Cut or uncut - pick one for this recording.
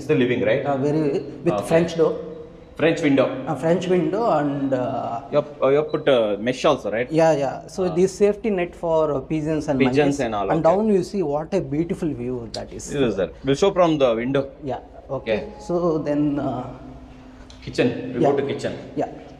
uncut